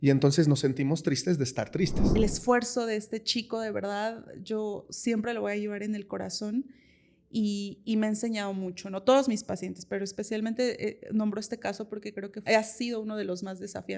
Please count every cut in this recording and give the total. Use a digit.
2